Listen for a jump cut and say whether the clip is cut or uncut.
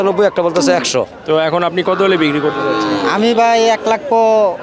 cut